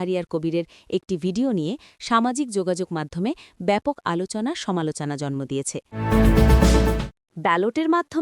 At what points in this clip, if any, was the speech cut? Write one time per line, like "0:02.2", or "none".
0:05.9